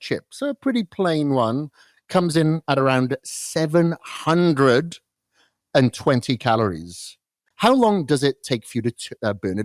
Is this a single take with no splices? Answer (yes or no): no